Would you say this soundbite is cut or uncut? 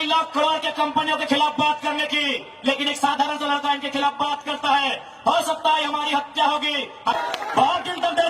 cut